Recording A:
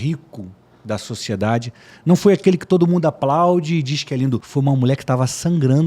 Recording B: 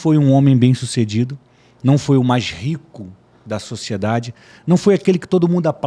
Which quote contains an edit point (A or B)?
A